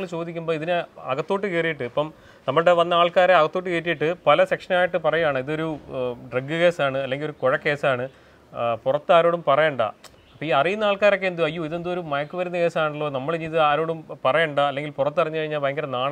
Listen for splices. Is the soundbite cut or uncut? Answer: uncut